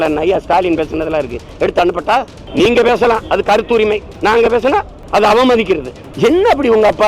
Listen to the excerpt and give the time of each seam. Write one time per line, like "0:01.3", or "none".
0:02.4
0:04.1
0:05.0
0:06.0